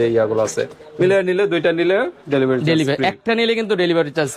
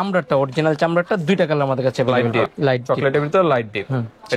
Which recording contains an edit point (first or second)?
second